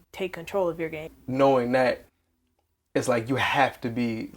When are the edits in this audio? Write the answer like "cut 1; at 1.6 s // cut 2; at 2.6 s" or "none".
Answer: cut 1; at 1.0 s